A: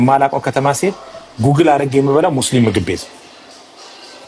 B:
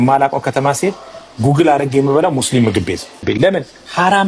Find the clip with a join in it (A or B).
B